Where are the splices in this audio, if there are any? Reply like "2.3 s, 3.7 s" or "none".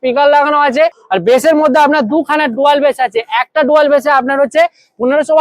1.0 s